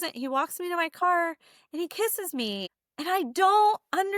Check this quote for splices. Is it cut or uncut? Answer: uncut